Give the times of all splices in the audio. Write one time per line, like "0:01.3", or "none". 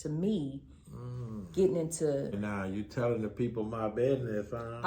0:02.4

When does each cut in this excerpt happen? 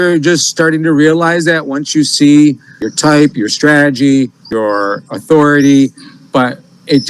0:02.9
0:04.4

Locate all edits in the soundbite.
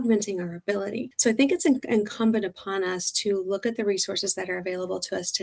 0:01.1

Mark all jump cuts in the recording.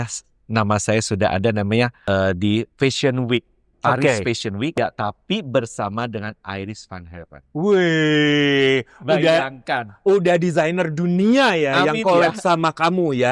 0:02.0
0:04.7

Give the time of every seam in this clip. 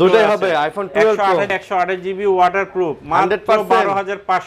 0:01.5

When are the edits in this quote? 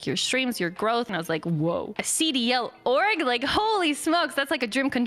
0:01.1
0:02.0

